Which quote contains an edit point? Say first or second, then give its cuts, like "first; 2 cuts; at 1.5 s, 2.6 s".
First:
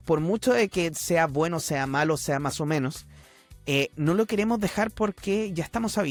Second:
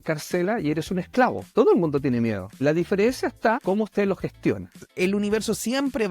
second; 4 cuts; at 1.5 s, 2.5 s, 3.6 s, 4.9 s